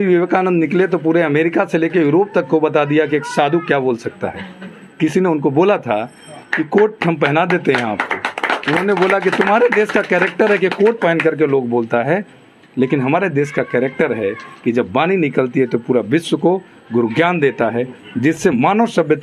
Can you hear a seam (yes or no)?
no